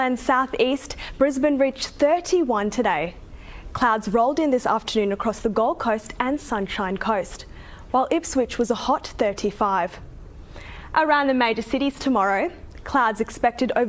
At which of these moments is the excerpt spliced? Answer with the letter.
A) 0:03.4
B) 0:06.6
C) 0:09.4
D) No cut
D